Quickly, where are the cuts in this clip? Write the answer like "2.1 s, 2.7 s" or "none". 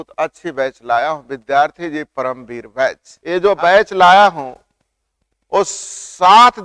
3.1 s